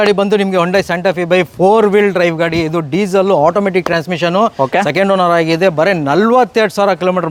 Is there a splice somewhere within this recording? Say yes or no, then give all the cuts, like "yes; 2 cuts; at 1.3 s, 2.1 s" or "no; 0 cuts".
no; 0 cuts